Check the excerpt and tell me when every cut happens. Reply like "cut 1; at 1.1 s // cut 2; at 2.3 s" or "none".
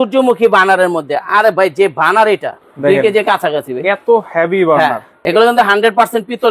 cut 1; at 2.6 s // cut 2; at 5.1 s